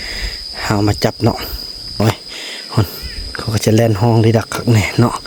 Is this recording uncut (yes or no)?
no